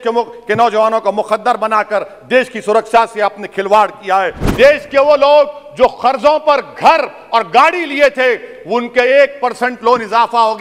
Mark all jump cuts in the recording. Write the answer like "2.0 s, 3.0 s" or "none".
4.4 s

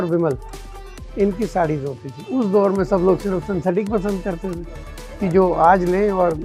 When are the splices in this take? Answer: 2.2 s

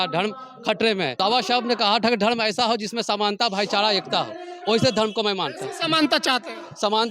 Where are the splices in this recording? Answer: 1.1 s

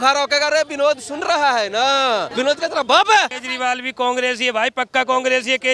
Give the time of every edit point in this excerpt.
2.3 s, 3.4 s

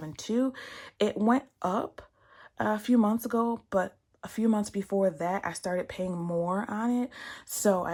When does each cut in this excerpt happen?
none

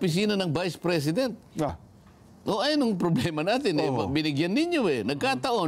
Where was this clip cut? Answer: 1.7 s

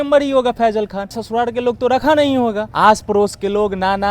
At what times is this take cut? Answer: 1.2 s, 2.7 s

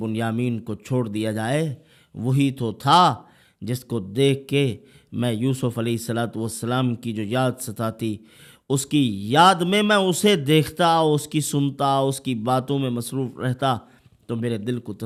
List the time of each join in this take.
none

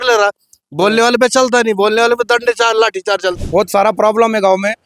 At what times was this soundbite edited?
3.4 s

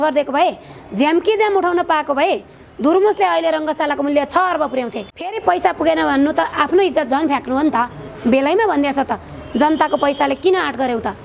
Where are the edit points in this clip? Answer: 5.4 s

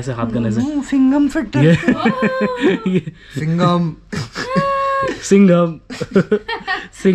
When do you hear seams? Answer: none

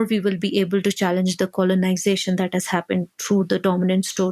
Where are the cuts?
3.1 s

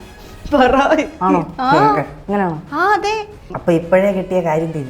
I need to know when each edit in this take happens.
3.5 s

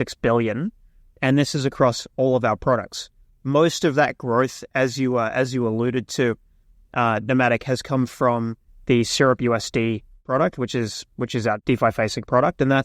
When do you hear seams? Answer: 10.2 s, 11.6 s

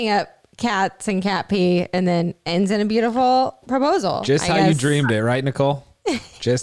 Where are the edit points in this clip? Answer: none

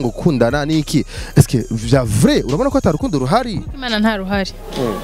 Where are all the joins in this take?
none

